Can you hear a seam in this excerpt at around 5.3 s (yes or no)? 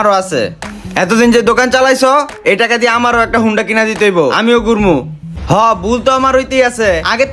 yes